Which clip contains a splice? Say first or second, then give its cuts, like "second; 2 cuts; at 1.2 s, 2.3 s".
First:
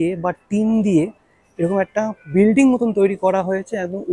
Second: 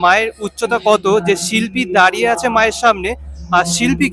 first; 1 cut; at 2.2 s